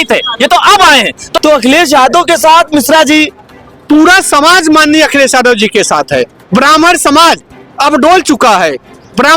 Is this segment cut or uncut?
cut